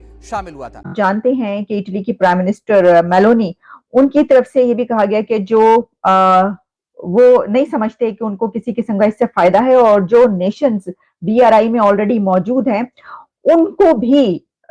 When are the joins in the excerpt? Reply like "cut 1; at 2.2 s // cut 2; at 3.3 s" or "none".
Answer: cut 1; at 0.9 s